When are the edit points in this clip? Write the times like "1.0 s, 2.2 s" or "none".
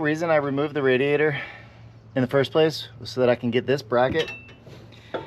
none